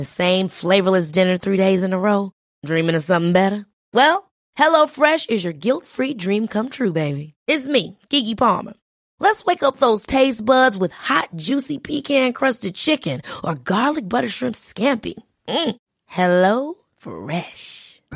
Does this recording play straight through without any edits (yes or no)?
yes